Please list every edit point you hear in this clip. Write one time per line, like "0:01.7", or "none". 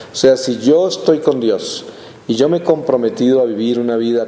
0:02.7